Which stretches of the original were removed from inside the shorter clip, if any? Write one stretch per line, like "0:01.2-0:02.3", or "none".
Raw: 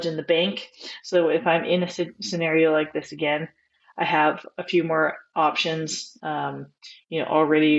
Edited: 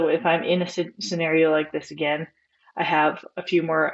none